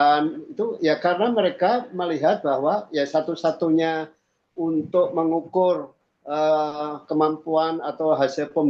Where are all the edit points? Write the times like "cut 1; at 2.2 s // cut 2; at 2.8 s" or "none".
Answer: none